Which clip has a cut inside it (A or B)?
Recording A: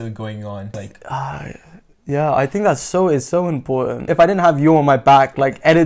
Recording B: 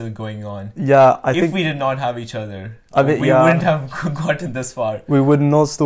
A